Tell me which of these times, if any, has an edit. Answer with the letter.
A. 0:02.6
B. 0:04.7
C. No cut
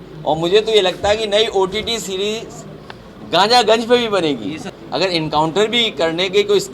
B